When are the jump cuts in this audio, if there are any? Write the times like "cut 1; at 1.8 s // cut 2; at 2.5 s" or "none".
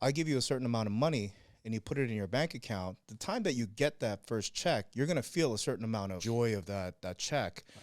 cut 1; at 6.2 s